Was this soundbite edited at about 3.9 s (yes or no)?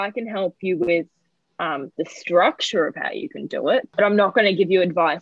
yes